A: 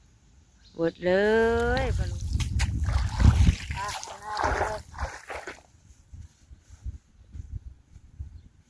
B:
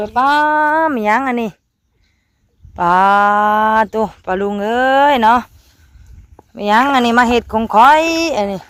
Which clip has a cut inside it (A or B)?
A